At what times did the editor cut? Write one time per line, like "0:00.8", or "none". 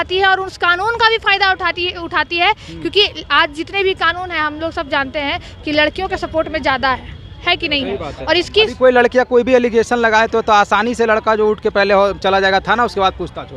none

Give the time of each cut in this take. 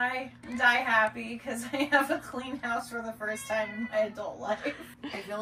none

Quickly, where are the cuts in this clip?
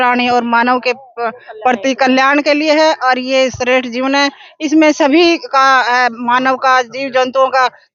none

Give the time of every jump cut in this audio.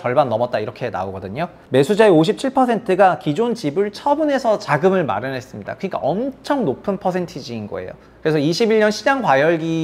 0:01.5

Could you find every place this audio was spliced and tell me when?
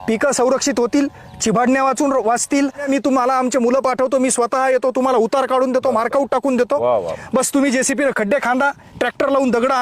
0:02.8

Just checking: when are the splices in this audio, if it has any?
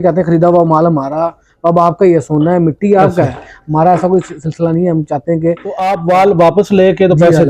0:05.9

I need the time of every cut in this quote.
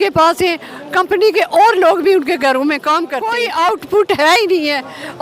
0:03.2

